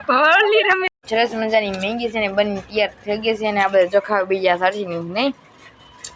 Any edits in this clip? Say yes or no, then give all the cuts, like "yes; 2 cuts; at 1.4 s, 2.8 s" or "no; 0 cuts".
yes; 1 cut; at 0.9 s